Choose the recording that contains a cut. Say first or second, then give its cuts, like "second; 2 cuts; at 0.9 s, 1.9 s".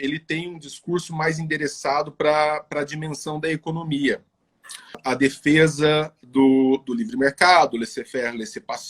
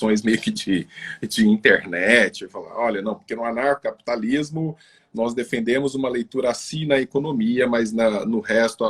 first; 1 cut; at 5.0 s